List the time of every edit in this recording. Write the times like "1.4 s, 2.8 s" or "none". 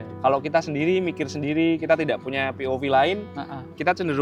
none